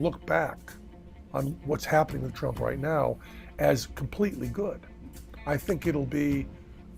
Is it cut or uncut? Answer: cut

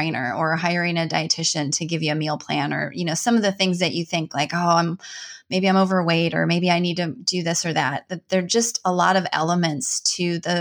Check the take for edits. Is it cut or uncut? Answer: uncut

